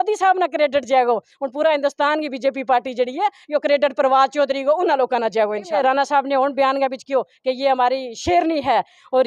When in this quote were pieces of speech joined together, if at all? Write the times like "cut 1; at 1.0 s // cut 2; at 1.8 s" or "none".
cut 1; at 5.8 s

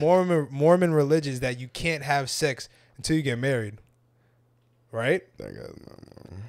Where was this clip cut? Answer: none

